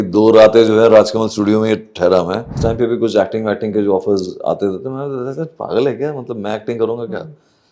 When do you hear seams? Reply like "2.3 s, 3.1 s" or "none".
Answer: 2.5 s